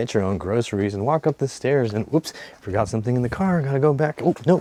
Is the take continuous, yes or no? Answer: yes